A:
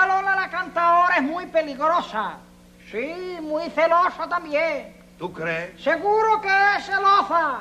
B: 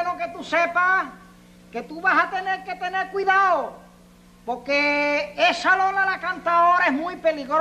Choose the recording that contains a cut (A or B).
B